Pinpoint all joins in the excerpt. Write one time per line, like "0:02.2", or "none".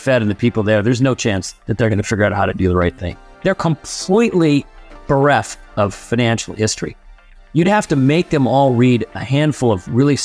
0:01.5
0:03.3